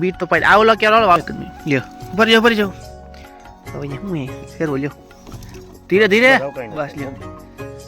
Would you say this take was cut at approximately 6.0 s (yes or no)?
no